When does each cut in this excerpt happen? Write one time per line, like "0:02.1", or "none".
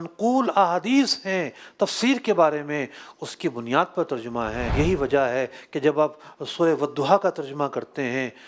0:04.7